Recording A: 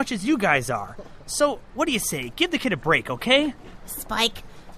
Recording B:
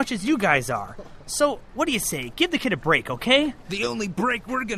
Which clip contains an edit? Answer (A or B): B